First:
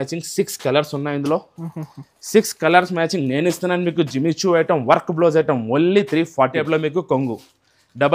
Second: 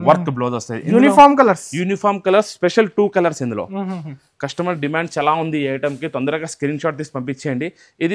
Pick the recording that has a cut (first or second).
first